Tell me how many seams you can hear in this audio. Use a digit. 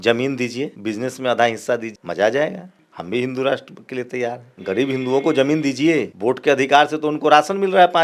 0